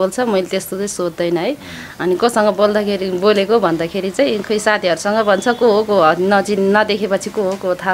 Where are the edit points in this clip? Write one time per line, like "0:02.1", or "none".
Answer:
none